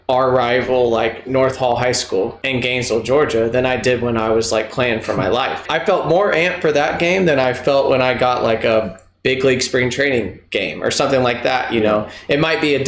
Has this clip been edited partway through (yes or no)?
yes